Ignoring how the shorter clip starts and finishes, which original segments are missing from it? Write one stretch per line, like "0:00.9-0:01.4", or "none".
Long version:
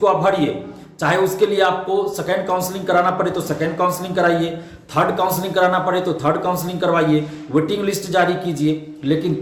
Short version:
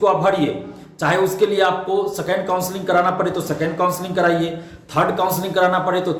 none